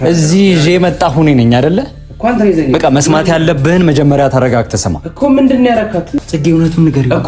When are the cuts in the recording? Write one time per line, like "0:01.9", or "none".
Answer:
0:06.1

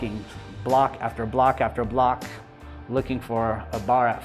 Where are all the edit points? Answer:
none

